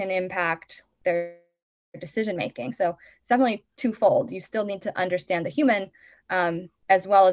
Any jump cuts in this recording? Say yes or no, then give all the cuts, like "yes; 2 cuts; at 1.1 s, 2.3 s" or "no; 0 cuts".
no; 0 cuts